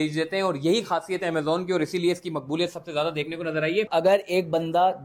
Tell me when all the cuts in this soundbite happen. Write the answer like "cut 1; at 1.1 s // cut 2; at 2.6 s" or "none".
cut 1; at 3.9 s